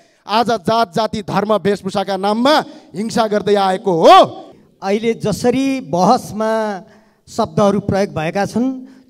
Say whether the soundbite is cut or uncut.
cut